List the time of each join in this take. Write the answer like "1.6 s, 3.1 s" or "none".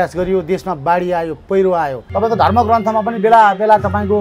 2.0 s